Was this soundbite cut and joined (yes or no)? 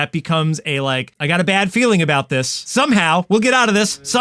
yes